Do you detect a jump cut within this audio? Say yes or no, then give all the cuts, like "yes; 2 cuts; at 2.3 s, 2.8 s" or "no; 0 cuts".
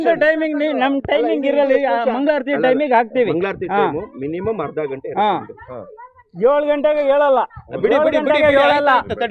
no; 0 cuts